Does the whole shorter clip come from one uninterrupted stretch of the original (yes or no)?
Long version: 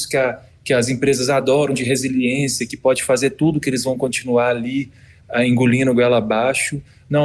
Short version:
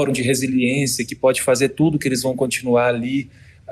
yes